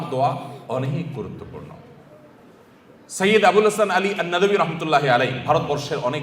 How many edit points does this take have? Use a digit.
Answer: 0